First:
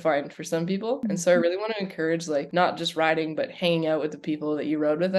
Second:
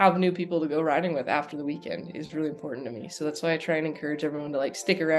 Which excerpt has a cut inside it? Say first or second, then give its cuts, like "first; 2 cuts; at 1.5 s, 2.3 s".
first; 2 cuts; at 1.0 s, 2.5 s